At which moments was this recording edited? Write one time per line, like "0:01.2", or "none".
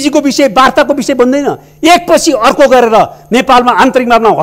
none